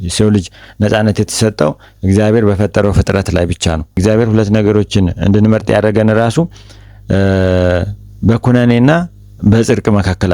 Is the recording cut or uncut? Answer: cut